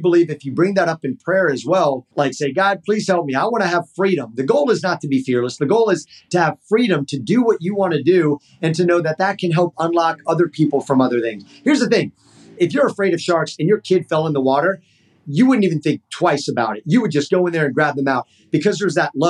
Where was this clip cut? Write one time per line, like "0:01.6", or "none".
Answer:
0:02.1
0:12.6
0:15.2

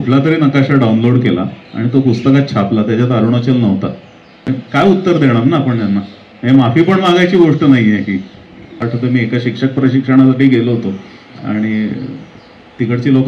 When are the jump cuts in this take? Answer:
0:04.3
0:08.8

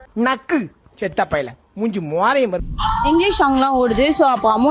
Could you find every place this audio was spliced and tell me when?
0:02.7

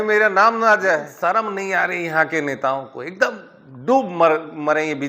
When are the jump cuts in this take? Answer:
0:01.1

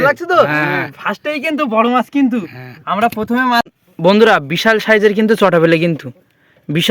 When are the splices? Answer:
0:03.7

